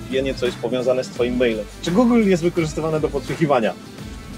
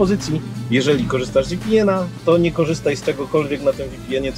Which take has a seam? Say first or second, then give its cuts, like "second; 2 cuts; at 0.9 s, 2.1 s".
first; 1 cut; at 1.8 s